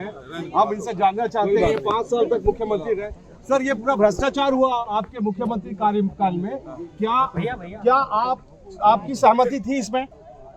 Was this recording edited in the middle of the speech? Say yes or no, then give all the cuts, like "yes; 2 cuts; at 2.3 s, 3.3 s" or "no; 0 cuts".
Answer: no; 0 cuts